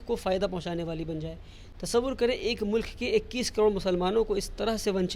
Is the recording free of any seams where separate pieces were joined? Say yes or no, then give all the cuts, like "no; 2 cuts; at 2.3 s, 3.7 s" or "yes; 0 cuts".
yes; 0 cuts